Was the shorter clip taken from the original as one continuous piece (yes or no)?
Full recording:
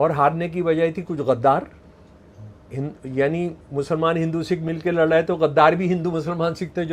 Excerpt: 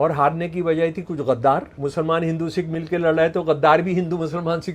no